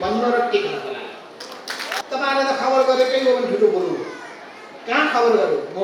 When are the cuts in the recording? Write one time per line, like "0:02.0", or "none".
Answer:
0:01.9